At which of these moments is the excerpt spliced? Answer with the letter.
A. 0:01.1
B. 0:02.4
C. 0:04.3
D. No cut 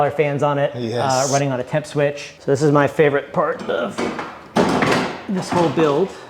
B